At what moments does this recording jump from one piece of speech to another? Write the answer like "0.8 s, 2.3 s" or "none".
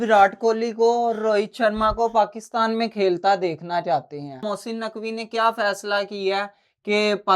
4.4 s